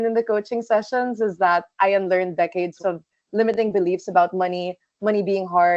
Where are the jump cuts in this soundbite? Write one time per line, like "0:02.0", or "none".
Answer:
0:02.8